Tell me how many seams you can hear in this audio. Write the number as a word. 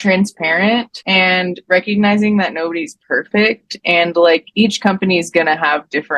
one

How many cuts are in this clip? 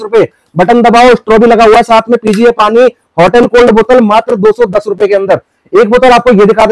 zero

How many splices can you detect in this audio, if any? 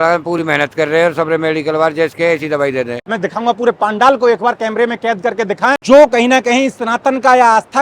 two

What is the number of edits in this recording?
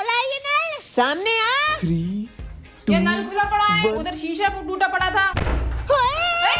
zero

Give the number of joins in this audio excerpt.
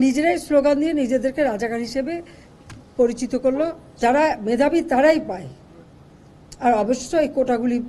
one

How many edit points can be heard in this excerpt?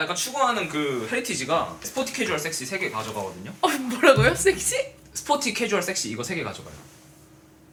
zero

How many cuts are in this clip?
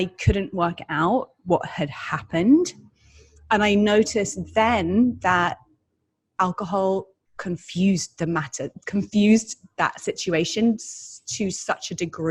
zero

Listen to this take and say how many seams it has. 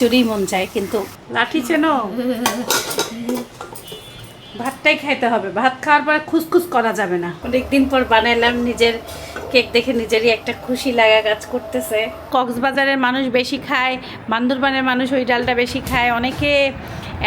three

